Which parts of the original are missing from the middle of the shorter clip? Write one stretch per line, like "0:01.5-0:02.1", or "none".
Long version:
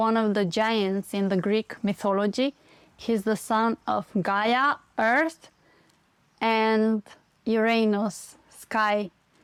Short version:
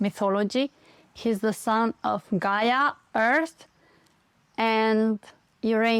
none